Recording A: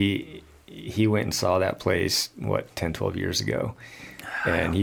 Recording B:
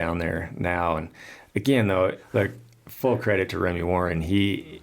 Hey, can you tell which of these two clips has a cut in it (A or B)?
B